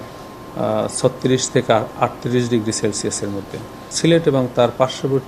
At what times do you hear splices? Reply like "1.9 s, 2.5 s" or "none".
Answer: 3.9 s